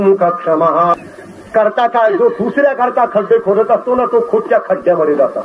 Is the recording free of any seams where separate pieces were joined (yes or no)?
no